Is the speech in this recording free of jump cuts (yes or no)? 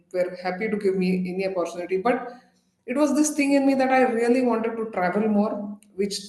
yes